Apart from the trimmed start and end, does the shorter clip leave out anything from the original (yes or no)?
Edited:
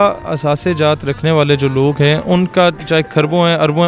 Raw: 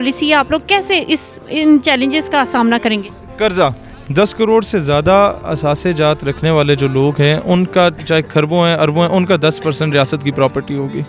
no